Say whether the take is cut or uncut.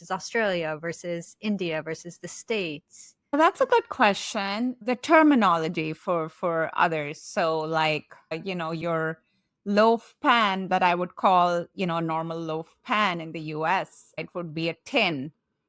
cut